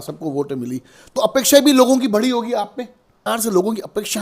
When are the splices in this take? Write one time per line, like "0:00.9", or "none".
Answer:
0:03.2

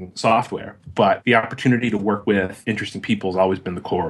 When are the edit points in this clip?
0:01.2
0:02.3

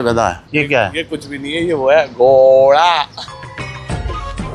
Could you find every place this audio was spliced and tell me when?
none

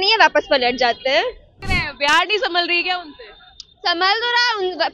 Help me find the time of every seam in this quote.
0:01.6

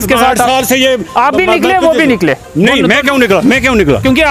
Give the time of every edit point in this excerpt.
none

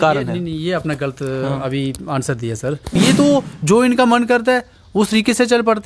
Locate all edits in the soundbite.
0:02.9

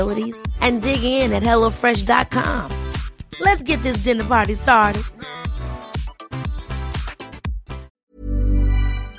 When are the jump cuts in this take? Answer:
0:08.0

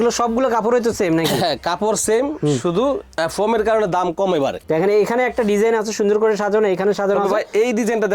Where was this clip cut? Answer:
0:04.6

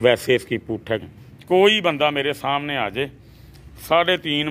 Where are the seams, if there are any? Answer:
0:01.1

